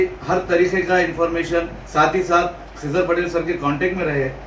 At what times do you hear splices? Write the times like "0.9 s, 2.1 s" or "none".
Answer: 1.8 s